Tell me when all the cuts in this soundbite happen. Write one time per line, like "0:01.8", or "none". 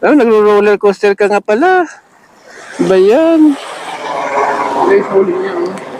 0:04.1